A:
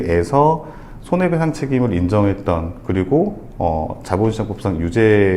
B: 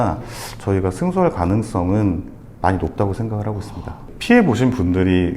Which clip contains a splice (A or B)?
B